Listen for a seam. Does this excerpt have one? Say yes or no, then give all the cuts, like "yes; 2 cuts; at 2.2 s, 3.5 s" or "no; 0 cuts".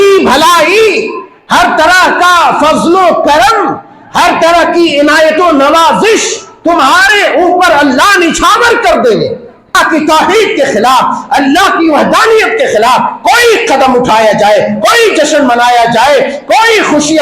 yes; 1 cut; at 9.8 s